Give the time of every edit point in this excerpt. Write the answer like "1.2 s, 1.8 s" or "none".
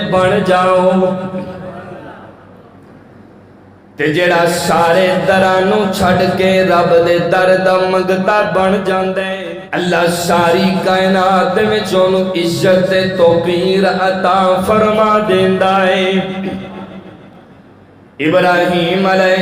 9.4 s